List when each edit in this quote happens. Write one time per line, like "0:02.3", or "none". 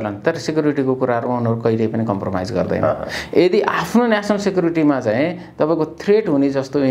none